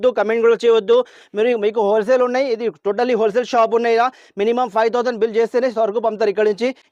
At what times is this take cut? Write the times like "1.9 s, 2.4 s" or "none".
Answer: none